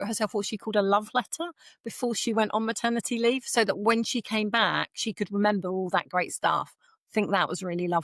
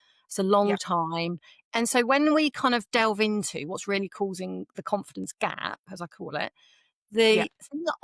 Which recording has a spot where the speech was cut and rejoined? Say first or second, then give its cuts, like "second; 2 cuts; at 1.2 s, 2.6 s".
second; 1 cut; at 1.5 s